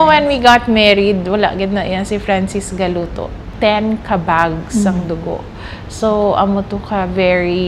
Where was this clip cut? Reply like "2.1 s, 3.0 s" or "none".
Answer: 3.4 s